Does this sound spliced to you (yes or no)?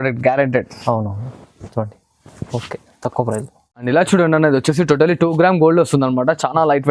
no